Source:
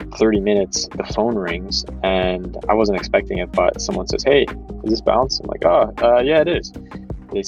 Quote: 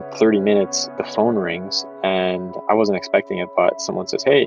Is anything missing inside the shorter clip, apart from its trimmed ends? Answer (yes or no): no